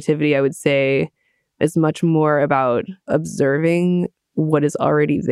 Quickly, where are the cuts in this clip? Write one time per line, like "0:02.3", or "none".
0:01.6
0:03.0